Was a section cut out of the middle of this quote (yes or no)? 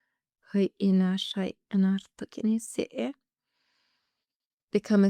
no